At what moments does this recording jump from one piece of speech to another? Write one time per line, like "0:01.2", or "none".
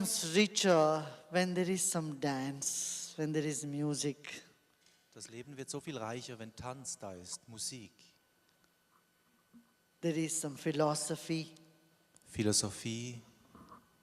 0:07.7